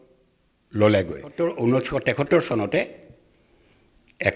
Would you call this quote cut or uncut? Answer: cut